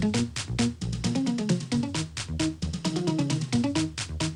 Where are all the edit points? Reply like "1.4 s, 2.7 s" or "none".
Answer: none